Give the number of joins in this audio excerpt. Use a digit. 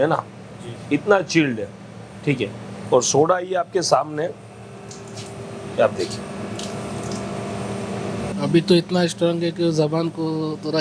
1